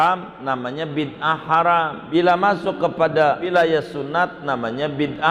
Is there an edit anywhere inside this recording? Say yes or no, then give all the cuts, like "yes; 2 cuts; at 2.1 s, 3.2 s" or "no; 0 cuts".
yes; 2 cuts; at 2.0 s, 3.5 s